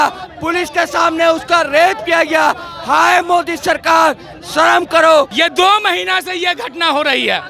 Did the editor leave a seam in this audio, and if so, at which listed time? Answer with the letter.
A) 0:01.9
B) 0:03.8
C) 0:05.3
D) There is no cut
C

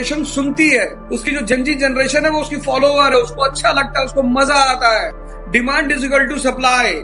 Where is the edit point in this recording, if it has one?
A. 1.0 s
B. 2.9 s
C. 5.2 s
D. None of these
D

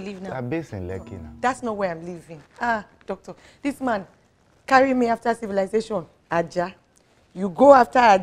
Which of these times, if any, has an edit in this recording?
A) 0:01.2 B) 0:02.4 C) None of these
A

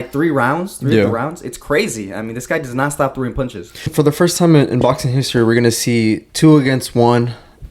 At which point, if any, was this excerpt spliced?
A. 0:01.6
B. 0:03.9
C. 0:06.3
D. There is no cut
B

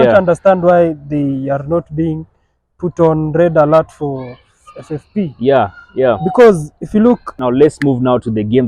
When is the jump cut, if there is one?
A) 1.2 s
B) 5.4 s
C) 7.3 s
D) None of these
C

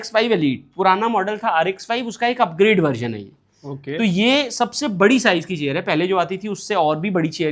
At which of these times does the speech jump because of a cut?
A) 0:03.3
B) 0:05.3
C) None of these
C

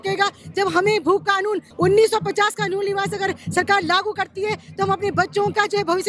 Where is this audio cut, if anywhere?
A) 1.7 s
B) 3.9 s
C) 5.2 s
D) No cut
A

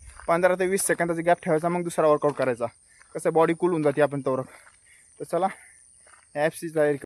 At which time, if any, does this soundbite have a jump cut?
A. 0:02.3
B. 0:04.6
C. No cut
C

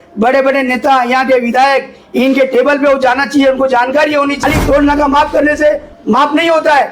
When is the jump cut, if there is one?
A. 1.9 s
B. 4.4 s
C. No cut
B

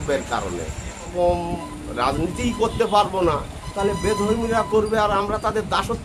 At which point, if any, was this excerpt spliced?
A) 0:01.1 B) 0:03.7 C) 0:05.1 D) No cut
A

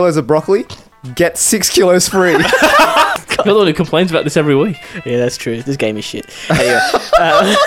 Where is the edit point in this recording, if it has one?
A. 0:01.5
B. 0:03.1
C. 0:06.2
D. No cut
B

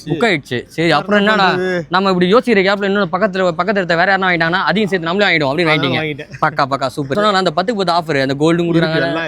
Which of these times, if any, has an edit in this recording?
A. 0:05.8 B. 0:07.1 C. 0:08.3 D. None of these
B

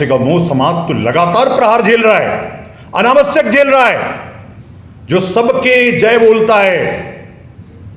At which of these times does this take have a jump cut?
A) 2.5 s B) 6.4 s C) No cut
C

